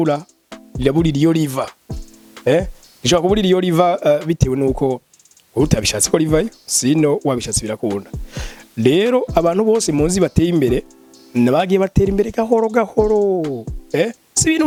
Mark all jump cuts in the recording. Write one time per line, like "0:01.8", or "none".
none